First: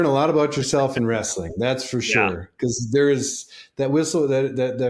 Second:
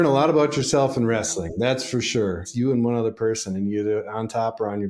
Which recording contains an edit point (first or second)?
second